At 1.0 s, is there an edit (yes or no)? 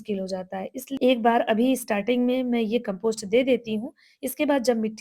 yes